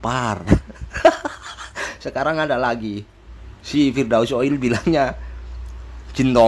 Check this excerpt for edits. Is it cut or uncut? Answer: uncut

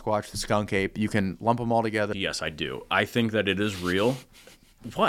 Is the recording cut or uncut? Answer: cut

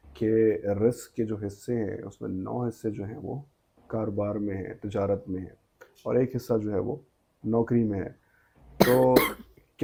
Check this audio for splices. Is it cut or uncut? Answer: uncut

